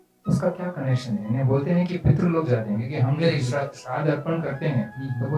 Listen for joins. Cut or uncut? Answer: uncut